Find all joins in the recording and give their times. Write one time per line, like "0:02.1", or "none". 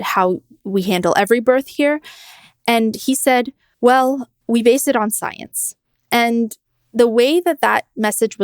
0:03.6
0:04.3